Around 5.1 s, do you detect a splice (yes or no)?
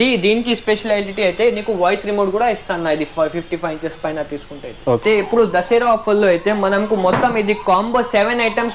yes